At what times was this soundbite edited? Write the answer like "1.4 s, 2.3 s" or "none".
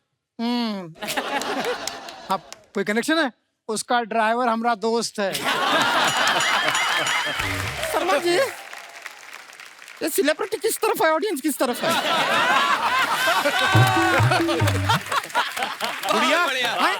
7.7 s